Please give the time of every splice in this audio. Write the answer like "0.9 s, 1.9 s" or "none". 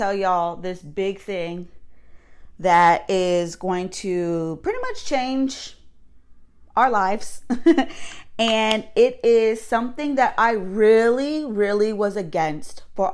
none